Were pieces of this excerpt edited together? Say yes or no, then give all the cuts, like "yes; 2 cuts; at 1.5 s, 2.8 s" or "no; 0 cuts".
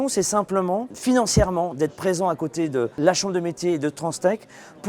yes; 2 cuts; at 0.9 s, 2.9 s